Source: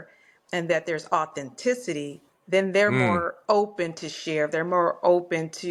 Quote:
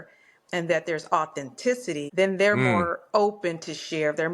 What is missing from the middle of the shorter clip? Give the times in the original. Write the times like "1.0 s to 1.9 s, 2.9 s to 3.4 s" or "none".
2.1 s to 2.4 s